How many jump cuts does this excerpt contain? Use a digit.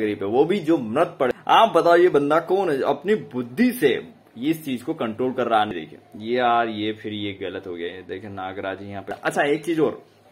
3